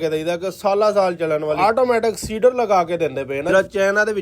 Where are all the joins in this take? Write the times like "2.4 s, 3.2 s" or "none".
1.6 s, 3.5 s